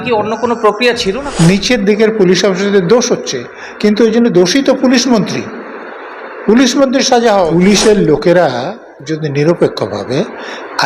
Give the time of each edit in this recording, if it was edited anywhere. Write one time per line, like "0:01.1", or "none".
0:01.2
0:07.5